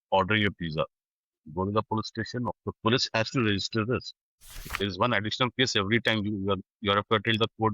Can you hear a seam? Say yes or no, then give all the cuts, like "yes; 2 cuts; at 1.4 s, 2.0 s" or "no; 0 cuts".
yes; 2 cuts; at 2.5 s, 4.7 s